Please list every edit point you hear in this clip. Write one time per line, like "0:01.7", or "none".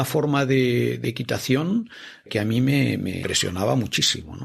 0:01.0
0:03.2